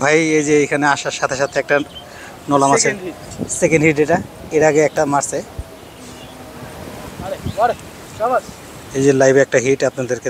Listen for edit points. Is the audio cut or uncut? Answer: cut